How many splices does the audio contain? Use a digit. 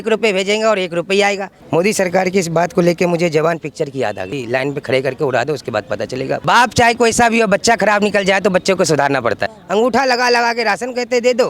4